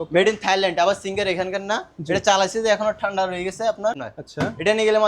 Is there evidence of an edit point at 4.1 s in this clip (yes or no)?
yes